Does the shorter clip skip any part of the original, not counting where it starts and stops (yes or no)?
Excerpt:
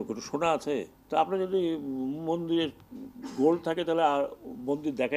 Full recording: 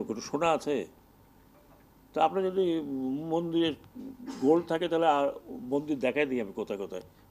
yes